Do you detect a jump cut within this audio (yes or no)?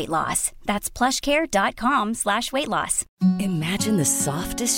yes